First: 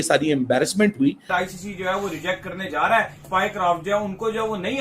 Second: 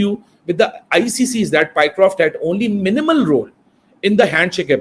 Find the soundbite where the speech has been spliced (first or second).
first